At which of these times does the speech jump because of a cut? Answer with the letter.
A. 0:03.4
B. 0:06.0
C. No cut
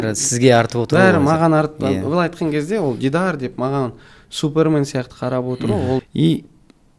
B